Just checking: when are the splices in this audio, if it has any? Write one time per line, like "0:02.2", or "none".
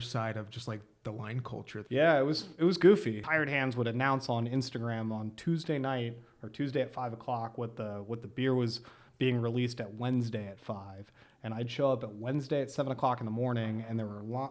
0:01.8
0:03.2